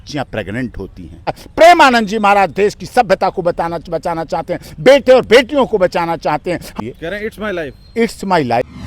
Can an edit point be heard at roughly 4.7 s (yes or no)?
no